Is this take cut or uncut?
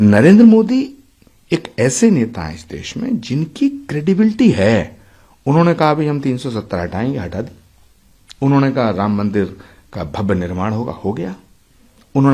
uncut